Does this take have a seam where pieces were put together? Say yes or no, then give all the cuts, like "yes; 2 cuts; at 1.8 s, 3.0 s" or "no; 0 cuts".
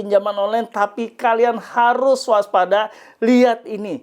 no; 0 cuts